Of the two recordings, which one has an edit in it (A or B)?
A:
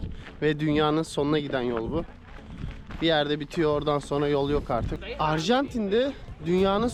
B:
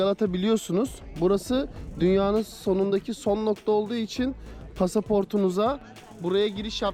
A